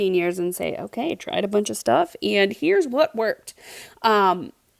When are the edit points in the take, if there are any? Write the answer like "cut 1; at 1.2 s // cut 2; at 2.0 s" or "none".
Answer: none